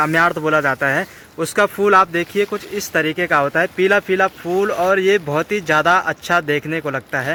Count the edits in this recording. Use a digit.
0